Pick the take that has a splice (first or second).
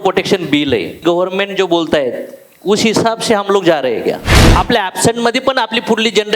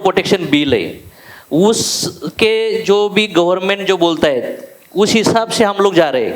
first